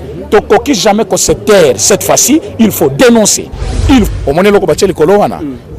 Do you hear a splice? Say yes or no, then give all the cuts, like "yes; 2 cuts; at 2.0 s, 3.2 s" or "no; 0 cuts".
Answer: yes; 1 cut; at 4.1 s